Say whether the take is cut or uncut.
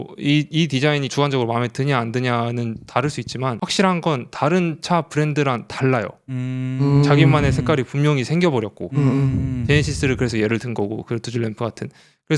cut